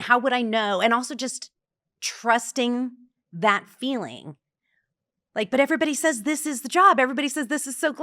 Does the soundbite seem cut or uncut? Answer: uncut